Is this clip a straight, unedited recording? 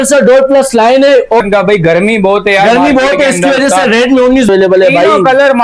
no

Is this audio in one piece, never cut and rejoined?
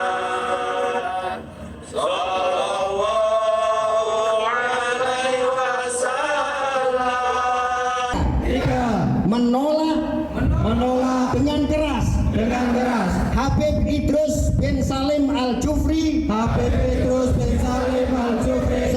no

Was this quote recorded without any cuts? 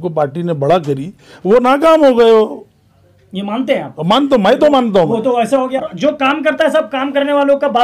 no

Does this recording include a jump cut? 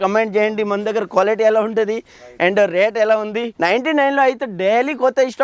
yes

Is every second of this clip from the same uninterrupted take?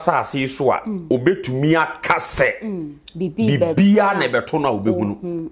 yes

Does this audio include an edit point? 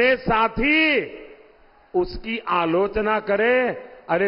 no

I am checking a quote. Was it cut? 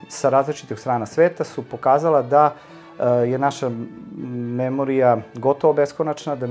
no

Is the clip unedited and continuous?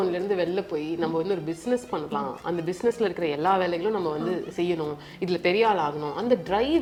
yes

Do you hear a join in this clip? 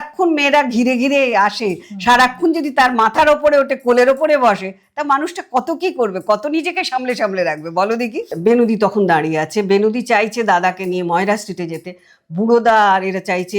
yes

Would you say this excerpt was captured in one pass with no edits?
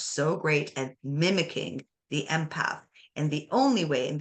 yes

